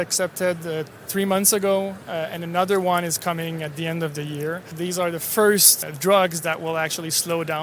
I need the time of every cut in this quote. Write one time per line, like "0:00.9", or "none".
0:04.7
0:05.8